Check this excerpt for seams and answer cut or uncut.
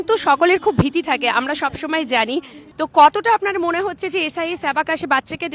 cut